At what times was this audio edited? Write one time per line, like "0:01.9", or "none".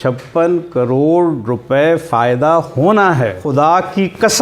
0:03.4